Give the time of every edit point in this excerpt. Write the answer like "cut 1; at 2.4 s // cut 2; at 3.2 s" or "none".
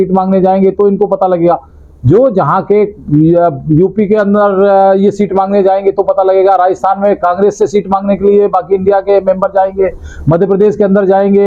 none